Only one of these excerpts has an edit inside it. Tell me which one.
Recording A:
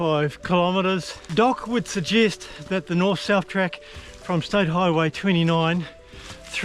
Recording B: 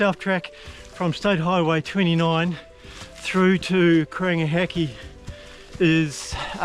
A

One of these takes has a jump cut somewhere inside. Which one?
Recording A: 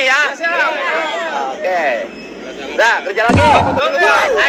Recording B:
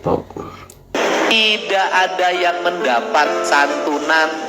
B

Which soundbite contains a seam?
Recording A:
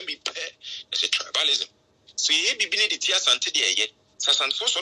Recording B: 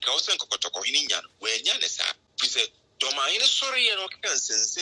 B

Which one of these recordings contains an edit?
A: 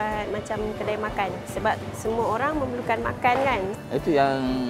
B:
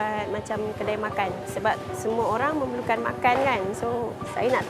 A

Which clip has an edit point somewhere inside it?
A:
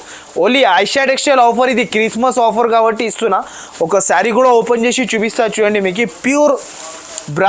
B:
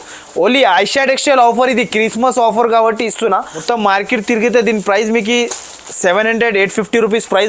B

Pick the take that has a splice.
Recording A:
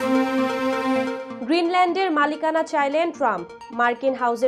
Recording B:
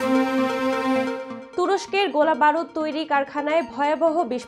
B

